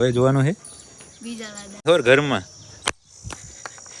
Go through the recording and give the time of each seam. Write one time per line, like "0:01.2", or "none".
0:01.8